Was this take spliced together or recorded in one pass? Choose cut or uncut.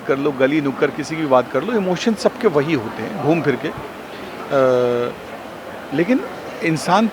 uncut